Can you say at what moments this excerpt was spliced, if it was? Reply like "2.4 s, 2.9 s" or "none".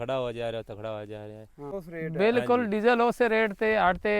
1.7 s